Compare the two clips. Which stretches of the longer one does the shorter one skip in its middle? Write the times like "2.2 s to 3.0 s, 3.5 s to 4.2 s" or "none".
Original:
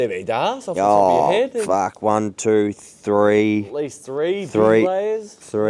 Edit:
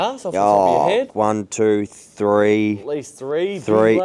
1.5 s to 2.0 s

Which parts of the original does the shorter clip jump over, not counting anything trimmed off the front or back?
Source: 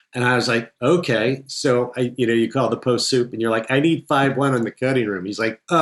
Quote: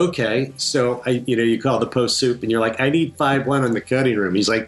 none

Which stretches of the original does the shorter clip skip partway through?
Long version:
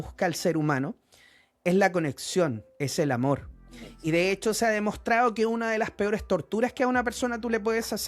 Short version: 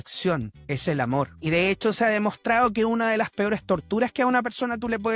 3.5 s to 4.0 s

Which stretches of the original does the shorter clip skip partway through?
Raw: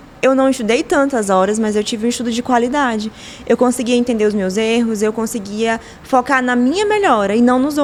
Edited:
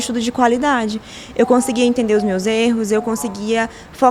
none

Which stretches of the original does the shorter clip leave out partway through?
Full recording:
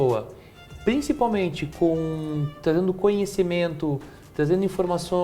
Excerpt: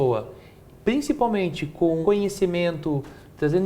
2.0 s to 3.0 s

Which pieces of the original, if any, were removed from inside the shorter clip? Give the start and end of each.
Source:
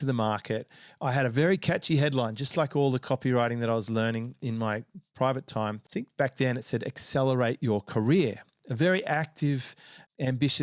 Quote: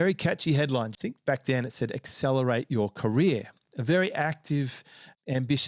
2.4 s to 5.9 s

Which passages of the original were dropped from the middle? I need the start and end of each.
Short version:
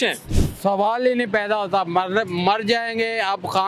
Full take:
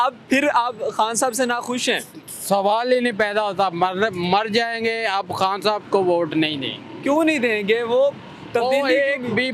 none

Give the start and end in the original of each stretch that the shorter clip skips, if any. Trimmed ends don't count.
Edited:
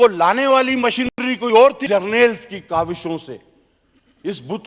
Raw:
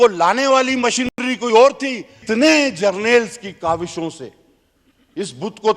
1.8 s to 2.7 s

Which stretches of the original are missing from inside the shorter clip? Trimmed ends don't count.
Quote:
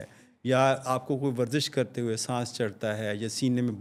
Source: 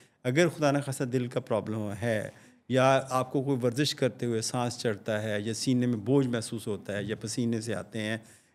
none

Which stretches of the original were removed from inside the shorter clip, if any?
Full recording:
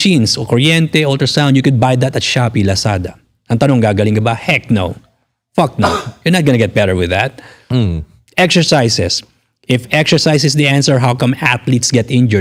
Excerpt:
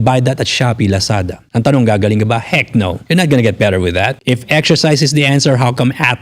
3.1 s to 3.3 s, 4.9 s to 6.1 s, 7.3 s to 9.6 s

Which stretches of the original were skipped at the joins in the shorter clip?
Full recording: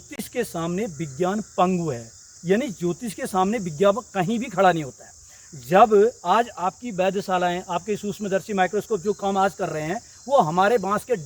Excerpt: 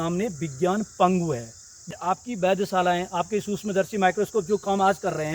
2.5 s to 6.4 s

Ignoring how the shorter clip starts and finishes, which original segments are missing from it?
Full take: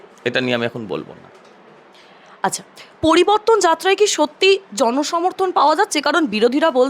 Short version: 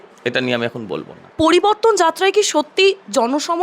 1.2 s to 2.8 s

